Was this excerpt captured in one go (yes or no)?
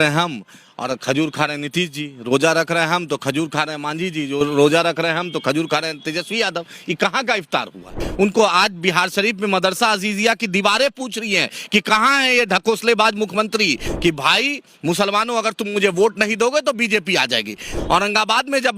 no